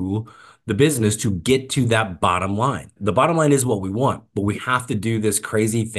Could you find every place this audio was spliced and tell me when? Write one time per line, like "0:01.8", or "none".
0:02.9

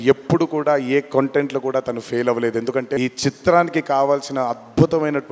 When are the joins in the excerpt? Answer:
0:03.0

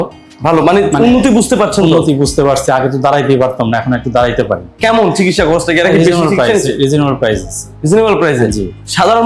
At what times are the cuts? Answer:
0:04.7

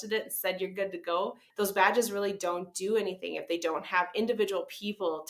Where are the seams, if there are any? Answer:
0:01.4

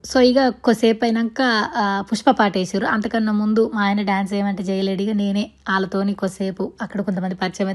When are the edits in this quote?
none

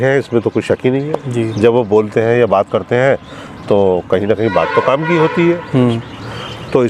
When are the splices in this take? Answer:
none

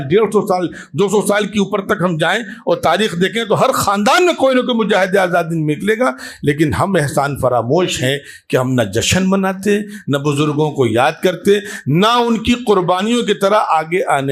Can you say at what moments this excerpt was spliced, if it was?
none

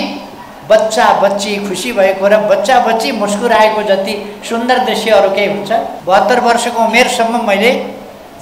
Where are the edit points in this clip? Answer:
0:05.9

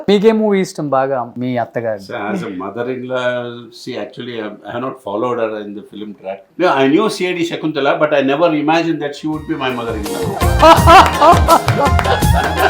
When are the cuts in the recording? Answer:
0:01.3
0:06.4

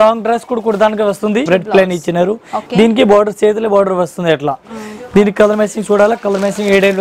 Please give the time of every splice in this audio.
0:01.5

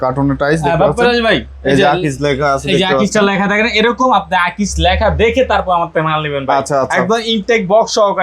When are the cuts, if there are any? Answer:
none

